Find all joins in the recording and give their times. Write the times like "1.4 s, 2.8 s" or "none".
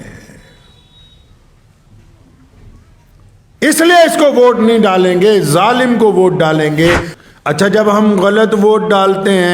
7.1 s